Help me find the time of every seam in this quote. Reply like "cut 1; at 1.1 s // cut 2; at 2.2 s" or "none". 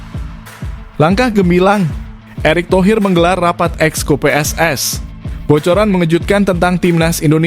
cut 1; at 0.9 s